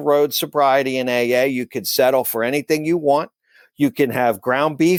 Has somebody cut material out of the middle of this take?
no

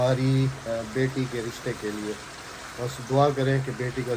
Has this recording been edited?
no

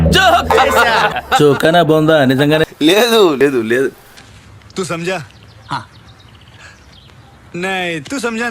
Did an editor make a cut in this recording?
no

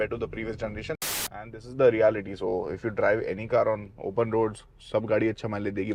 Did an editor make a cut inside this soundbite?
yes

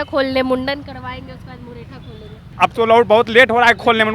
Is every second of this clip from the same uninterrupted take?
no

